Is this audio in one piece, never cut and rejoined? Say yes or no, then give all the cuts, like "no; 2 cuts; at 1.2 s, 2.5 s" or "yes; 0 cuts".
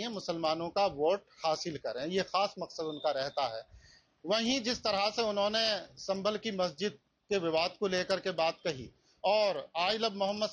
yes; 0 cuts